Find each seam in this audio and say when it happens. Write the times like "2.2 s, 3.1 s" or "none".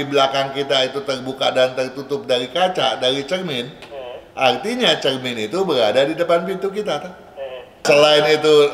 7.8 s